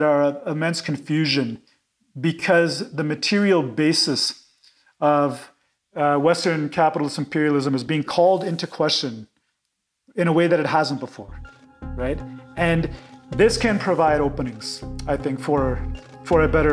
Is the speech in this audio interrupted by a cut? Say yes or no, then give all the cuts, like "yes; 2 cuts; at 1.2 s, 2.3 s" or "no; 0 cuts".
no; 0 cuts